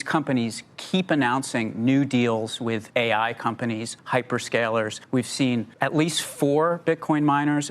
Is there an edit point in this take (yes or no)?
yes